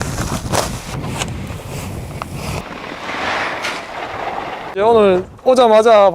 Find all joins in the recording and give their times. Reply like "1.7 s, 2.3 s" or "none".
1.0 s, 2.6 s, 4.7 s